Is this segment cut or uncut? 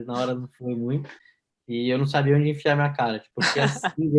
cut